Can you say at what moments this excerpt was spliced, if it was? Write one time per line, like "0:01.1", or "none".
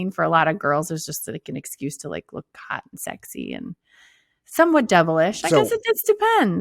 none